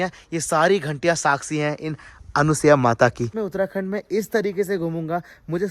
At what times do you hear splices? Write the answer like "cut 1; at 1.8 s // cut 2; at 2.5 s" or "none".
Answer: none